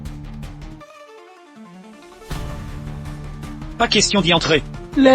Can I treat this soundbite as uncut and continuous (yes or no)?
no